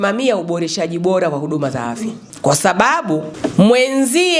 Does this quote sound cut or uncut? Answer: cut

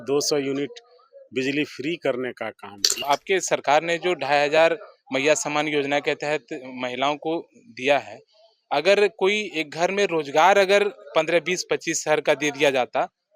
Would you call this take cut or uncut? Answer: cut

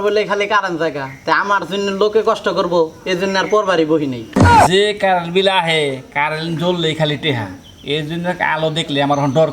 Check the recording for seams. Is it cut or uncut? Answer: cut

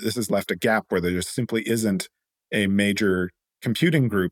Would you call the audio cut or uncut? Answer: uncut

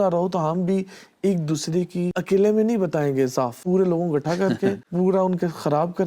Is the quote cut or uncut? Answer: cut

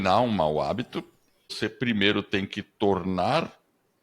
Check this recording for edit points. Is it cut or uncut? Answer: cut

